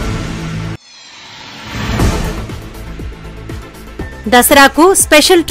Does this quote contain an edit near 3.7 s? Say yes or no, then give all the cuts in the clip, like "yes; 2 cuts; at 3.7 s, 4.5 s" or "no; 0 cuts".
yes; 1 cut; at 3.7 s